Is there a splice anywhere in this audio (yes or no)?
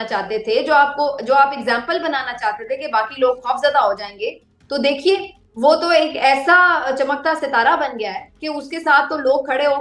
no